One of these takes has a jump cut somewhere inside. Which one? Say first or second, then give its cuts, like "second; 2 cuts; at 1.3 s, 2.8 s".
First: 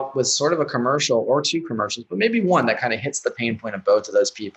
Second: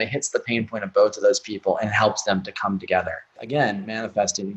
second; 1 cut; at 3.4 s